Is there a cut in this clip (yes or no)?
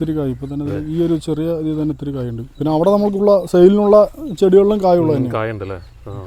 no